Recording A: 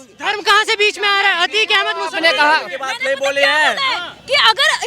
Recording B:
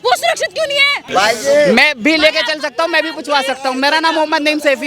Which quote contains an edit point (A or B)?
B